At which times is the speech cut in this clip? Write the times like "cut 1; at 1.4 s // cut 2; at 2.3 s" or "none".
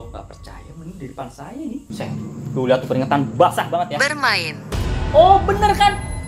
cut 1; at 1.9 s